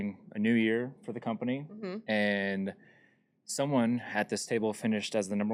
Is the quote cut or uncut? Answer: uncut